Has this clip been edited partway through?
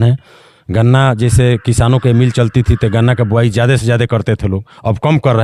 no; 0 cuts

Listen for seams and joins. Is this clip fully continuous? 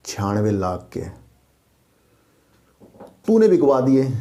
yes; 0 cuts

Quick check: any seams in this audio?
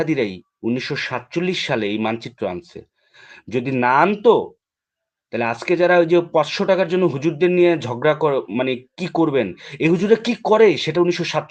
no; 0 cuts

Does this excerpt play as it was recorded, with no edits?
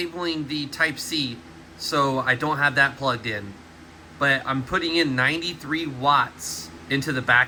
yes; 0 cuts

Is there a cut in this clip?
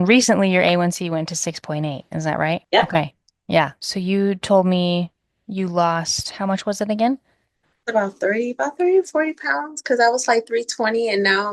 yes; 2 cuts; at 2.6 s, 3.3 s

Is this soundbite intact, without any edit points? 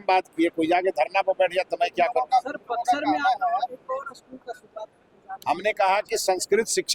yes; 0 cuts

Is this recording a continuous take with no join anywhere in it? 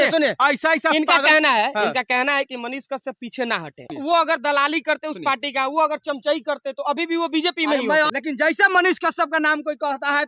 no; 2 cuts; at 3.9 s, 8.1 s

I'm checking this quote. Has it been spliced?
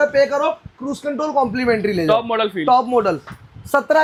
no; 0 cuts

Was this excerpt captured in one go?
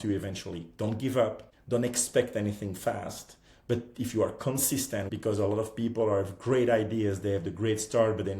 no; 2 cuts; at 1.5 s, 5.1 s

